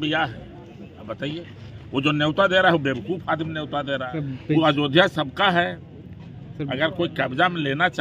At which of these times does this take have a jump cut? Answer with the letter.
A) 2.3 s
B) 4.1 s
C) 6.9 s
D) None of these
B